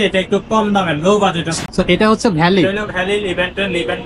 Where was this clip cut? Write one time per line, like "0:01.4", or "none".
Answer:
0:01.6